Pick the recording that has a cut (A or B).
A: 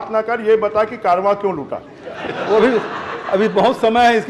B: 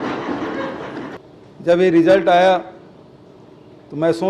B